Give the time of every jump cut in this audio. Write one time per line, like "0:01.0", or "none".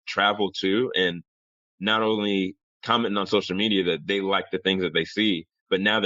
none